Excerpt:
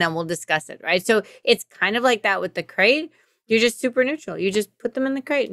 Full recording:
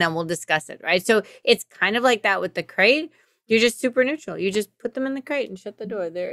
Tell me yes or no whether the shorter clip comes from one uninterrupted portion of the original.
yes